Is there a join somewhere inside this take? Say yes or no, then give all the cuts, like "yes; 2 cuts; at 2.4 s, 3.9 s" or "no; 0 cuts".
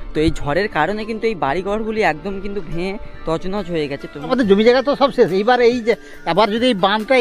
yes; 1 cut; at 4.3 s